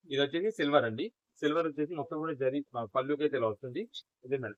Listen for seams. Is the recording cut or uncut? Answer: uncut